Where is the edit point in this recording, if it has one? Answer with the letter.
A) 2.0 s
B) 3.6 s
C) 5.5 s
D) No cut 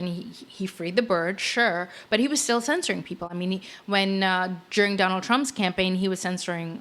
D